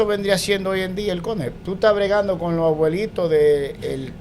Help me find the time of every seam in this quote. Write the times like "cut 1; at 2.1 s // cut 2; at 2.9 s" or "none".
cut 1; at 1.6 s